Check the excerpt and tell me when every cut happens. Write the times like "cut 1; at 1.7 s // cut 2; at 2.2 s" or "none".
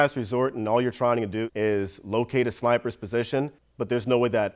cut 1; at 3.5 s